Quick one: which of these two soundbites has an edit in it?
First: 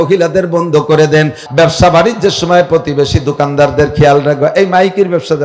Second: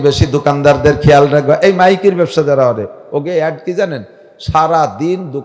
first; 1 cut; at 1.4 s

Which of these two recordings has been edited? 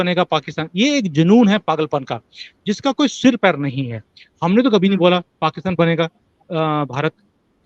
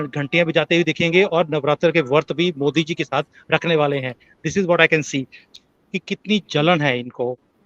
second; 1 cut; at 5.4 s

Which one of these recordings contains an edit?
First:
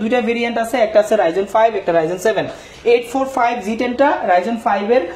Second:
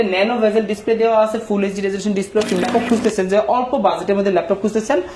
second; 1 cut; at 2.6 s

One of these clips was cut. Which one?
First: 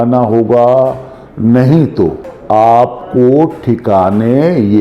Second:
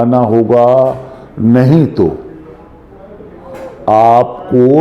first; 1 cut; at 2.3 s

